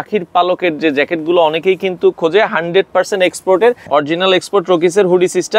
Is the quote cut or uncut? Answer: cut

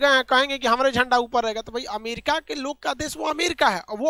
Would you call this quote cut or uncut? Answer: uncut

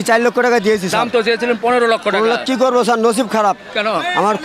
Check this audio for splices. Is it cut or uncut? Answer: uncut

